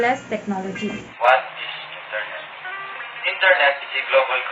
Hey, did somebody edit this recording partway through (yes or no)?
yes